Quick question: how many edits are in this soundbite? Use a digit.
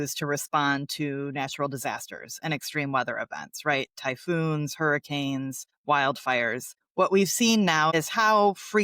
1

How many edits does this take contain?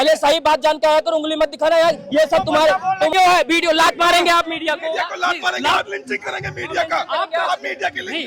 1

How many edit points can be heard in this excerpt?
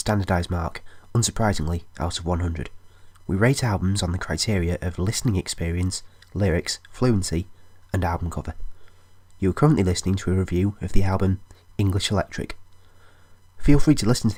0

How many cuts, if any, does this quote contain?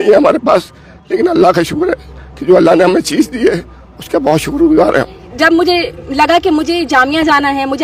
1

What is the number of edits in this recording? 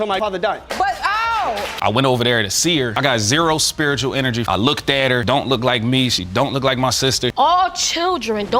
2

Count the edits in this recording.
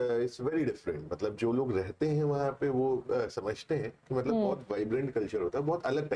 0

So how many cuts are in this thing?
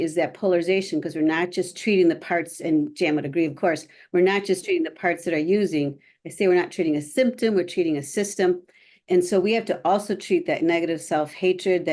0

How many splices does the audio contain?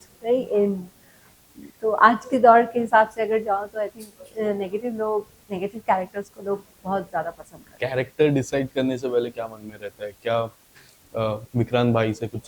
0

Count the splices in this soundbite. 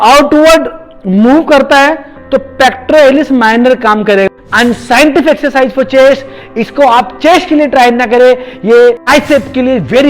3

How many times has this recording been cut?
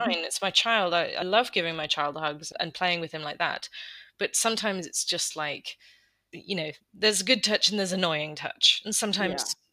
3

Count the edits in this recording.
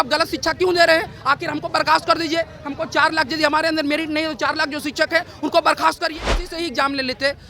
1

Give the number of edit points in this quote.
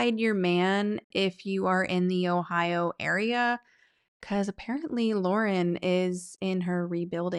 0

